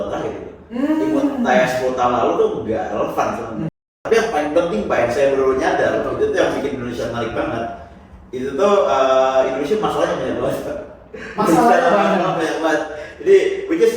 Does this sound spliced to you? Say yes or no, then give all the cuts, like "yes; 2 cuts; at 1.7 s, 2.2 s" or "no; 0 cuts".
yes; 1 cut; at 3.9 s